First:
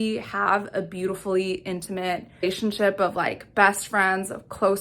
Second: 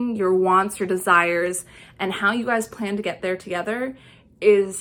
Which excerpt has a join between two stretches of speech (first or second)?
first